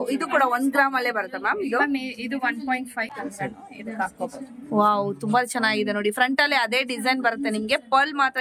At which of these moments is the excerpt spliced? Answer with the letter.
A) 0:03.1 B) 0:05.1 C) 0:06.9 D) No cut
A